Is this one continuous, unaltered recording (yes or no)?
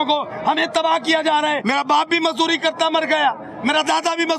no